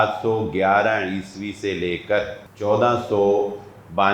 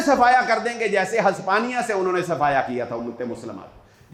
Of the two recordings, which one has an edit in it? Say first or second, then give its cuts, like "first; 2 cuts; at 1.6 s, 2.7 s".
first; 1 cut; at 2.4 s